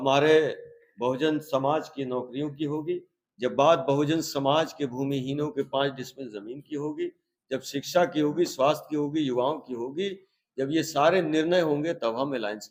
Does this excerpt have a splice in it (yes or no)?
no